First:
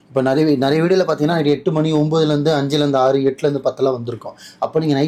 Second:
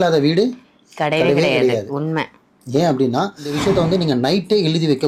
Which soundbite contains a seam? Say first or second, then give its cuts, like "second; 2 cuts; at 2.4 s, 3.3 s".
second; 1 cut; at 3.6 s